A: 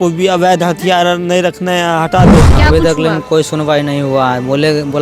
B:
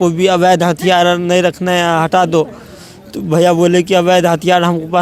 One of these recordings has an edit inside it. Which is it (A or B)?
A